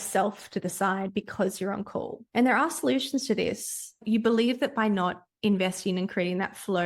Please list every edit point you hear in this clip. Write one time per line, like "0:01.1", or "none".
0:02.2
0:04.0